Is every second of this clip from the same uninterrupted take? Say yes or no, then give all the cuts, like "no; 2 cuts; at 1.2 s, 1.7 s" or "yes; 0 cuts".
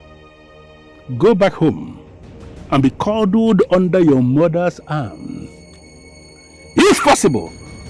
yes; 0 cuts